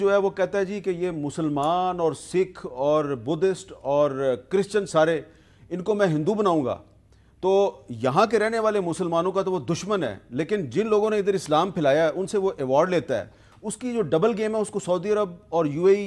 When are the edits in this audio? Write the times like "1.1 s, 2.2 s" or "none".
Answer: none